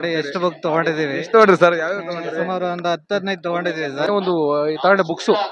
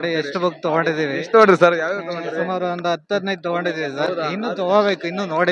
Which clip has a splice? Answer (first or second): first